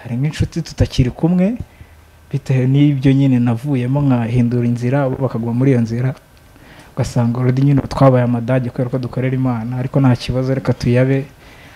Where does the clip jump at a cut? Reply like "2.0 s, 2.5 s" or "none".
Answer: none